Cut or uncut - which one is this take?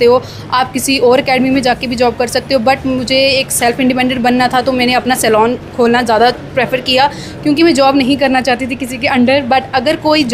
uncut